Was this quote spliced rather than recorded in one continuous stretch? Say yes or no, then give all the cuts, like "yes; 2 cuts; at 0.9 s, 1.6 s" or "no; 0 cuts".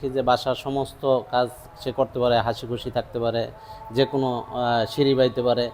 no; 0 cuts